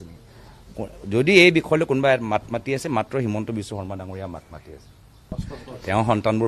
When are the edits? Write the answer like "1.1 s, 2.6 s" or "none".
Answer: 5.4 s